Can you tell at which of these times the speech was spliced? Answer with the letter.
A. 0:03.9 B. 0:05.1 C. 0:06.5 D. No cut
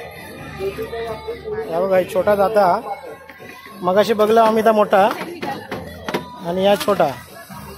D